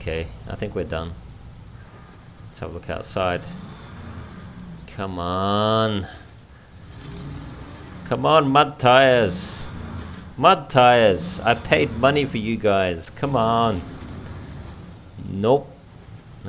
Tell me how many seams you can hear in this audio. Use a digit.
0